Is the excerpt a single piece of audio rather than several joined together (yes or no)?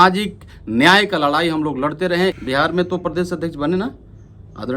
no